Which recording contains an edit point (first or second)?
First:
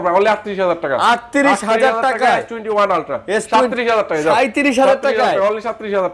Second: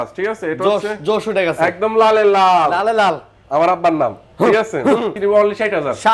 second